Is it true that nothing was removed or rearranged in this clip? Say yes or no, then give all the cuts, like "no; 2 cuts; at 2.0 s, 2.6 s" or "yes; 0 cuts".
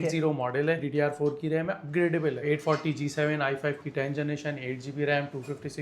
no; 2 cuts; at 0.8 s, 2.4 s